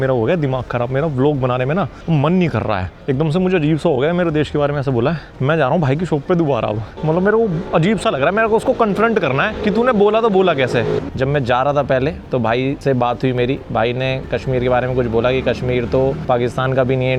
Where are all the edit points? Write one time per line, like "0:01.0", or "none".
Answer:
0:02.0
0:02.9
0:05.3
0:06.9
0:07.6
0:09.6
0:11.0
0:12.8
0:16.2

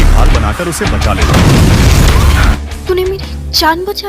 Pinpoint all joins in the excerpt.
0:02.6

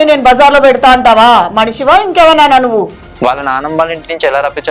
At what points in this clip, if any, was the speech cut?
0:03.0

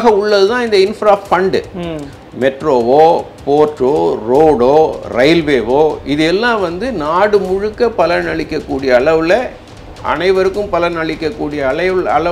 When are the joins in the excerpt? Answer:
none

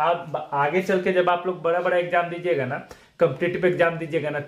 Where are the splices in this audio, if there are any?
none

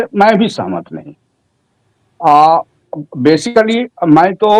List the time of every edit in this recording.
none

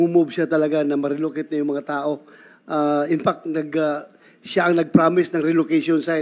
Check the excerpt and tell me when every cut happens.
none

